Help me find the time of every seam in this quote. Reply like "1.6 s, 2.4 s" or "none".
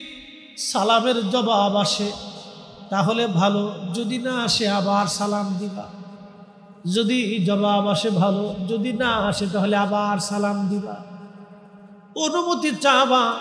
none